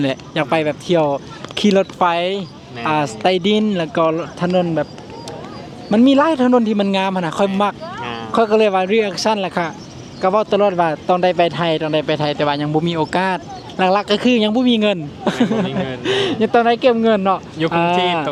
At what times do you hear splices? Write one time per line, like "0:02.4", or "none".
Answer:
none